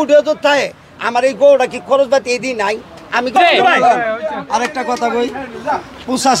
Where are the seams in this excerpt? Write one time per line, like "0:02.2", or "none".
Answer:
0:03.4